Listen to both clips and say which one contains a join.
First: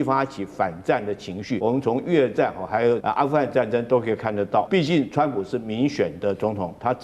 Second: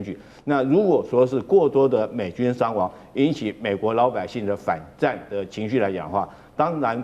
first; 3 cuts; at 1.6 s, 3.0 s, 4.7 s

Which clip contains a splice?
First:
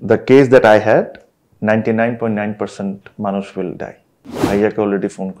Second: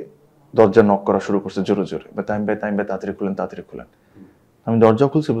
first; 1 cut; at 4.4 s

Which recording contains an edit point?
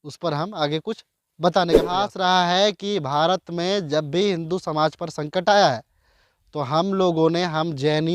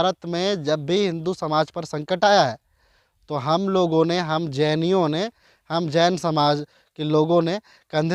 first; 1 cut; at 1.9 s

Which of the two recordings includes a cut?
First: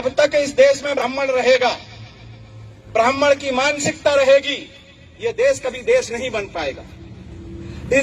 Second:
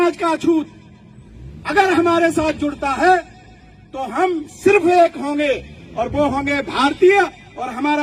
first; 1 cut; at 1.0 s

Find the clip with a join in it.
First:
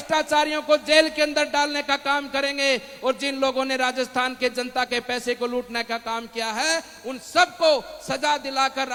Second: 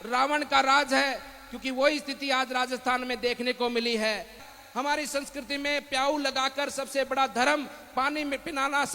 second; 1 cut; at 4.4 s

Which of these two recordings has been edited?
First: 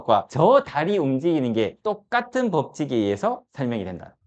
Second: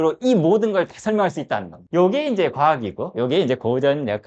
second; 1 cut; at 1.8 s

